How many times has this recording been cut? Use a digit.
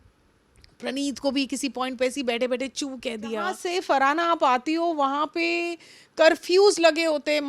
1